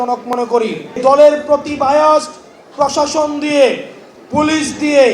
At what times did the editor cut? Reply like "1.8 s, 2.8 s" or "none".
1.0 s